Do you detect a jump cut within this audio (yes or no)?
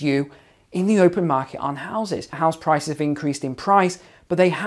yes